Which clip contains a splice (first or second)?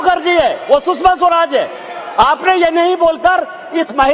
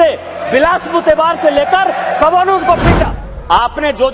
second